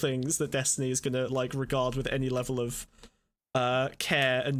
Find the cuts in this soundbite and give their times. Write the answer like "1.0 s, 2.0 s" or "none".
none